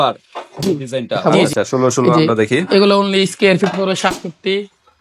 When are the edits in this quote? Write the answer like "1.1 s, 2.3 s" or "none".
1.2 s